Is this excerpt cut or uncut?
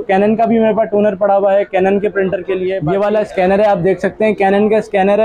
cut